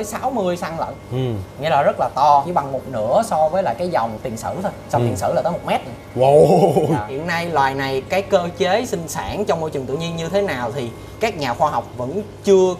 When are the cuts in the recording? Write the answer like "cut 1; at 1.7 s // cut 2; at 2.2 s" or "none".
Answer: cut 1; at 2.5 s // cut 2; at 4.2 s // cut 3; at 7.1 s